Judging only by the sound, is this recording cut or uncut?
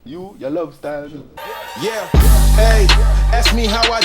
cut